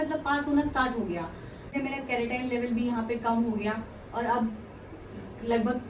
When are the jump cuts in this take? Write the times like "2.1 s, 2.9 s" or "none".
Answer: 1.7 s

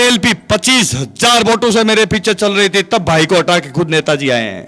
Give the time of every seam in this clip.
none

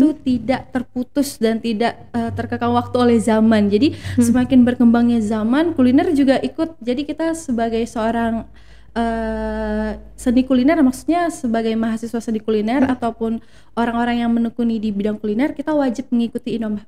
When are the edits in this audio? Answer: none

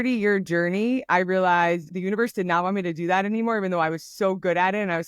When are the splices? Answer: 1.9 s

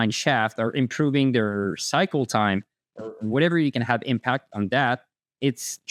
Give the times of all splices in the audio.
none

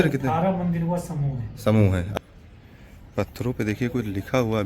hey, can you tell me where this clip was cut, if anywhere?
2.1 s

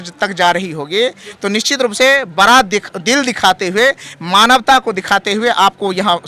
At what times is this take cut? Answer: none

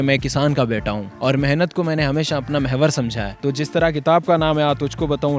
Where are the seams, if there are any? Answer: 1.1 s, 3.3 s

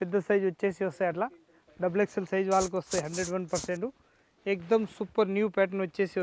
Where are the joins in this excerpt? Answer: none

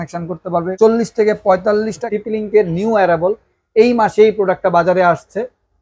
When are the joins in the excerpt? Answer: 0.8 s, 2.0 s

